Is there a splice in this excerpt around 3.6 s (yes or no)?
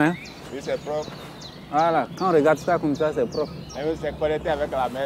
yes